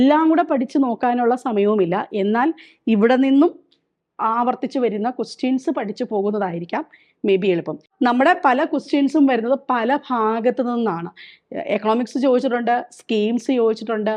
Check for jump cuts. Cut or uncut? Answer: cut